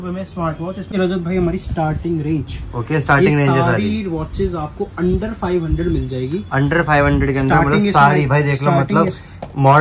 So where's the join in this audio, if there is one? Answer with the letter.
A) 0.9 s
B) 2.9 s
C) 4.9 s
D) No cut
A